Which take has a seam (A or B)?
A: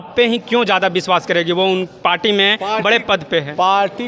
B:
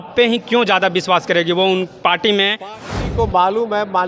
B